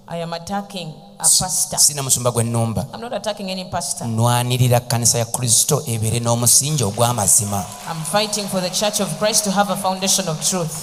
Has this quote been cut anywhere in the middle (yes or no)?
no